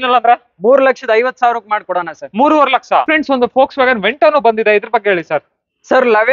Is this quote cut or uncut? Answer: uncut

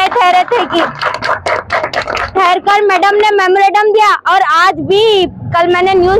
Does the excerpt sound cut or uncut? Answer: uncut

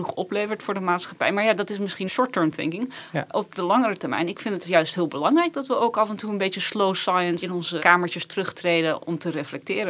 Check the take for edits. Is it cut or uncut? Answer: cut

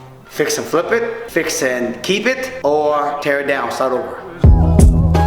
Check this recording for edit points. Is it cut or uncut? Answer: cut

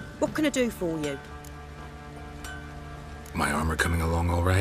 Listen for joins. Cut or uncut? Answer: cut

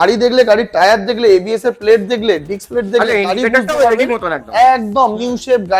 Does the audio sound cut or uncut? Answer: uncut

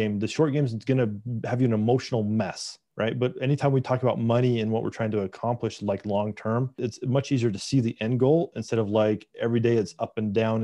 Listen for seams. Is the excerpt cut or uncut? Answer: uncut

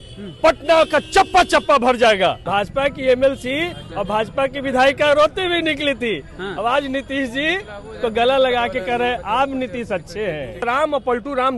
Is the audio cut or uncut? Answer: cut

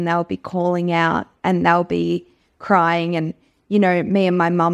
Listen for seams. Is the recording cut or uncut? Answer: uncut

